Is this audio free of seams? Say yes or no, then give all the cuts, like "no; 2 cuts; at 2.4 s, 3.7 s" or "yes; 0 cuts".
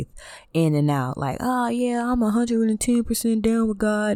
yes; 0 cuts